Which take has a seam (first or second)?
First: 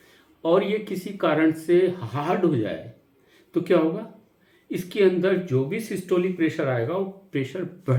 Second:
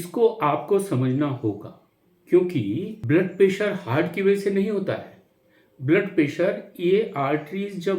second